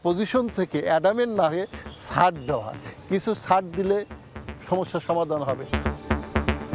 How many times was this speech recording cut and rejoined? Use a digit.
1